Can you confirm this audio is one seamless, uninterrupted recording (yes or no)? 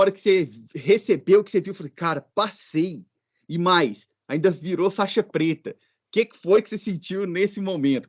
yes